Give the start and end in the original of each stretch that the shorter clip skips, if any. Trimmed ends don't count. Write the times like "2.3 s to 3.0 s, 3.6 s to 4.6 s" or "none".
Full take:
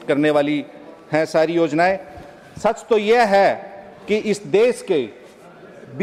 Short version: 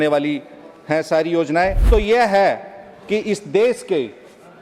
2.0 s to 2.8 s